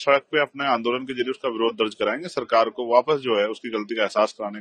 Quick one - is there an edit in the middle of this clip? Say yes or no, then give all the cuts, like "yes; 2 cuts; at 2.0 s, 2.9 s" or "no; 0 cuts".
no; 0 cuts